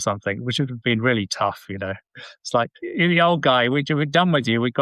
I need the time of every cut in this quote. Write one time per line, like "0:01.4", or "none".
none